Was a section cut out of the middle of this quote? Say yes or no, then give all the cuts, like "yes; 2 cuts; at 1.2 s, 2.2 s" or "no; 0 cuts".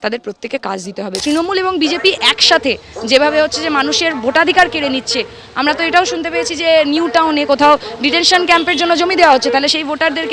yes; 1 cut; at 1.2 s